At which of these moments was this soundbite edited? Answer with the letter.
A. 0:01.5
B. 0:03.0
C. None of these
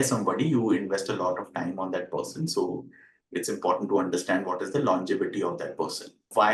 C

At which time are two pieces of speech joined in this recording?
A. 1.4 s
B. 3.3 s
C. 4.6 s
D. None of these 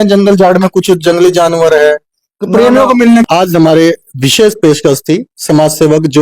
B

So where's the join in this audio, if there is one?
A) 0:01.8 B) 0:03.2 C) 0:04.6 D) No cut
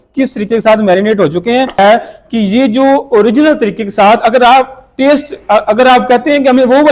A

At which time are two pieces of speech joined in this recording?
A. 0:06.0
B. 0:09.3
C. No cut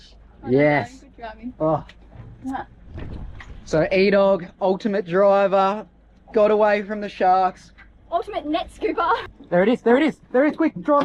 B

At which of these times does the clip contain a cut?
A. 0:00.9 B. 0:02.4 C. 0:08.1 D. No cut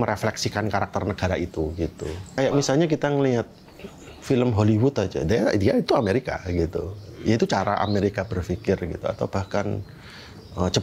B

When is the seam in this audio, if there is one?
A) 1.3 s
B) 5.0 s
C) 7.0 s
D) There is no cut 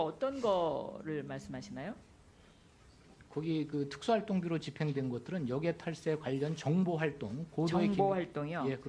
C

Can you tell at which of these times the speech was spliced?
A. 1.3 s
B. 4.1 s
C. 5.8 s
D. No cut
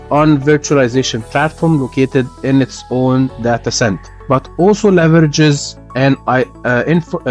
B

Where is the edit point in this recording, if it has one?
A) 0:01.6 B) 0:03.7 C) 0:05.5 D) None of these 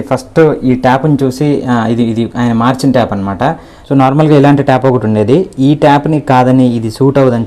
B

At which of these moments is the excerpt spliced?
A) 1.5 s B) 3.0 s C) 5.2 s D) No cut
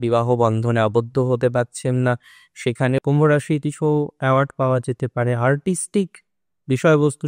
B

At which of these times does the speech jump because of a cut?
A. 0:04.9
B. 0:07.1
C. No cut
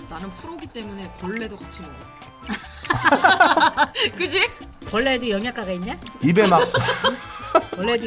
A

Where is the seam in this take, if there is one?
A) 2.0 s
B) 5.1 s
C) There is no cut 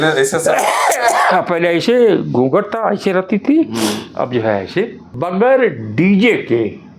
B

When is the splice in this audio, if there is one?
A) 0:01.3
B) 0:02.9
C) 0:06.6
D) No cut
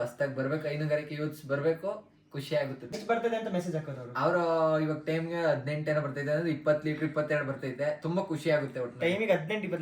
B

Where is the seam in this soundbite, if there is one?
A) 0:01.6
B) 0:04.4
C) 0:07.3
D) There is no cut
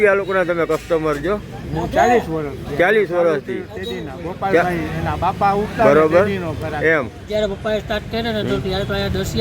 C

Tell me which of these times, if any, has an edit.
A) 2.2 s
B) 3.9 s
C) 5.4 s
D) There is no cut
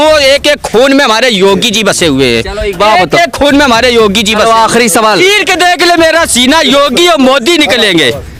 D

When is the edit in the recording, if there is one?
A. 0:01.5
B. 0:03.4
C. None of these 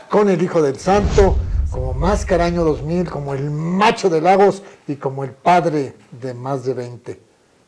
A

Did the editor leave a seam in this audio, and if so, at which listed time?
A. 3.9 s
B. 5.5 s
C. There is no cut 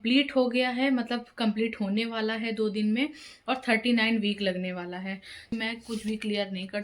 B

